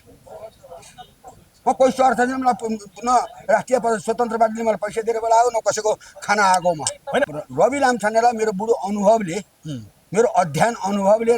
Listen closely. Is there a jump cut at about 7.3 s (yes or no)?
yes